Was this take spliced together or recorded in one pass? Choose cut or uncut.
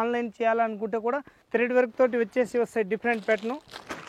cut